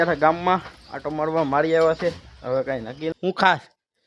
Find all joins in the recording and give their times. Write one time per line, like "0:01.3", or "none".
0:03.1